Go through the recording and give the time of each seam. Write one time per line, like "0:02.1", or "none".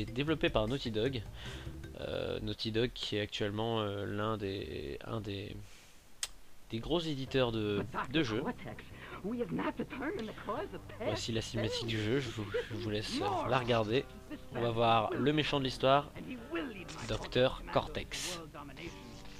0:17.6